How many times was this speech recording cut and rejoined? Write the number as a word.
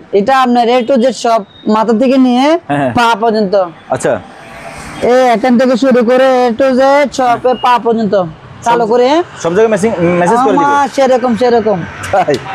zero